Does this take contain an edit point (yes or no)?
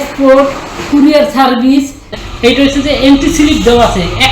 yes